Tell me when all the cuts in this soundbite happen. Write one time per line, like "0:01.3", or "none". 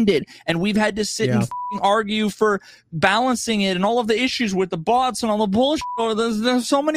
none